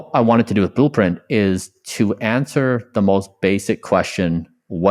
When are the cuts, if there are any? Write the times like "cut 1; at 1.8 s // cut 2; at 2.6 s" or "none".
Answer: none

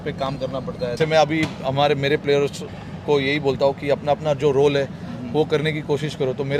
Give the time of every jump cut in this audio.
cut 1; at 1.0 s

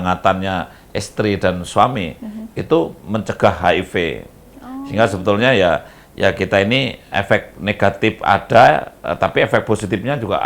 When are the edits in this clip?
none

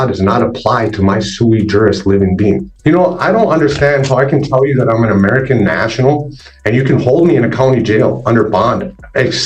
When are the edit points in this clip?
cut 1; at 2.6 s

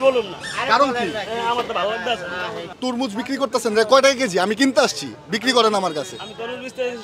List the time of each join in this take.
cut 1; at 2.7 s

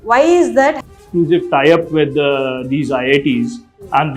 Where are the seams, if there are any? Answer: cut 1; at 0.9 s

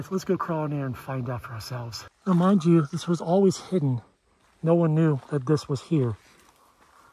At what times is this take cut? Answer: cut 1; at 2.0 s

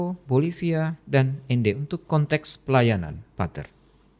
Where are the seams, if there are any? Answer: none

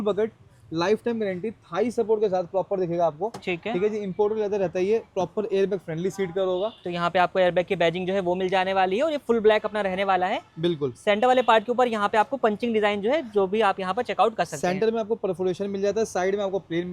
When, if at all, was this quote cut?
none

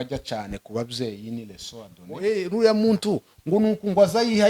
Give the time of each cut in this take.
cut 1; at 2.2 s

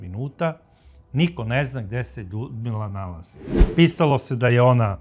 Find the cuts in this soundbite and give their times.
cut 1; at 3.5 s

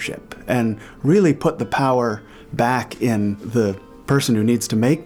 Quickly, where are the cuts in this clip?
cut 1; at 3.4 s

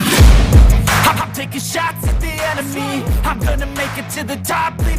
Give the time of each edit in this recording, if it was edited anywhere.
cut 1; at 1.1 s

